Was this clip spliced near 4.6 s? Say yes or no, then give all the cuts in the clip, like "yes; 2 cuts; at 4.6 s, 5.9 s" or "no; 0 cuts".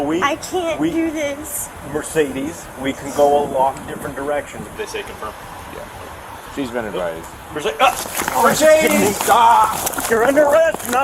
yes; 2 cuts; at 4.6 s, 10.1 s